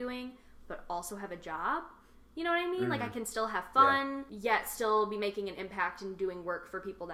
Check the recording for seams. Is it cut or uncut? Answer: cut